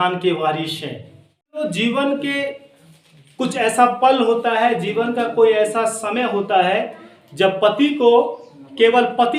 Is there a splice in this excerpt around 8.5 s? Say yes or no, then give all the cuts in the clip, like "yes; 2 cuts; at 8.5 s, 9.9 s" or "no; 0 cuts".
no; 1 cut; at 1.6 s